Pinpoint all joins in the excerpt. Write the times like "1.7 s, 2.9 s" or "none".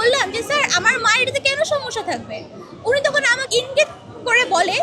3.5 s